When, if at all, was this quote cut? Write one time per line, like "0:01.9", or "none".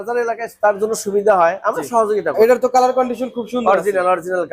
0:02.4